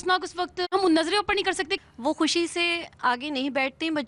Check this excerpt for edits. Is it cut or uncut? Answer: cut